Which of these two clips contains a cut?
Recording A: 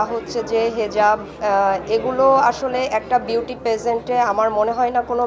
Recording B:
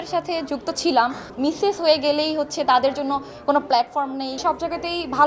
B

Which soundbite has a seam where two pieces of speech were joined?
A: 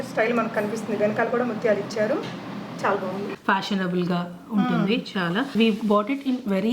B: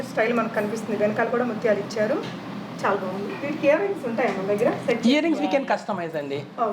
A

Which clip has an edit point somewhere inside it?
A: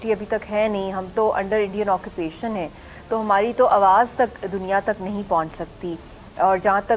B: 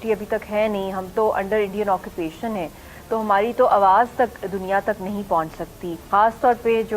B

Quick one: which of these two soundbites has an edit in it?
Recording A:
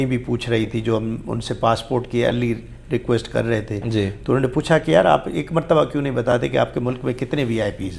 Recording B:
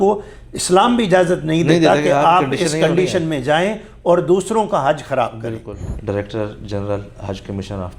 B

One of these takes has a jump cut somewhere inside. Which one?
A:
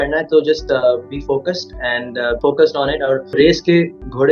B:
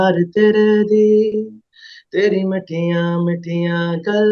A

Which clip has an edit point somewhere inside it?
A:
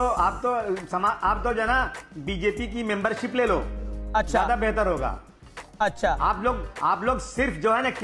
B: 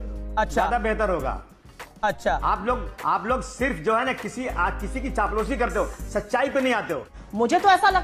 B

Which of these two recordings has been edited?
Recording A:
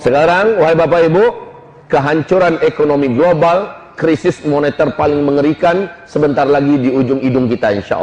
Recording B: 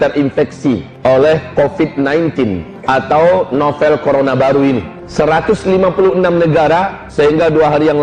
B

